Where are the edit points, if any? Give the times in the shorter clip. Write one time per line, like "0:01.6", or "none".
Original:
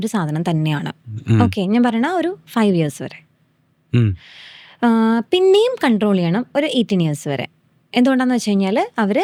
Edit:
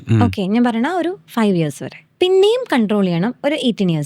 0:02.1